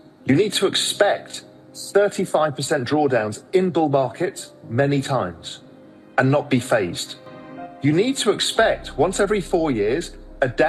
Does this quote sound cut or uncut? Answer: uncut